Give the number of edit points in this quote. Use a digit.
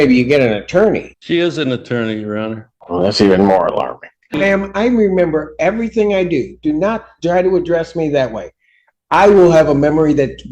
3